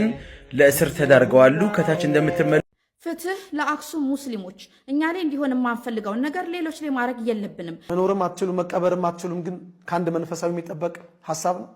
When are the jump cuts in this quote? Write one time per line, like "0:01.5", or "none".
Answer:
0:02.6
0:07.7